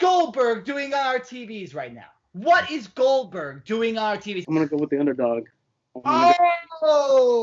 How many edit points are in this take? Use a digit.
1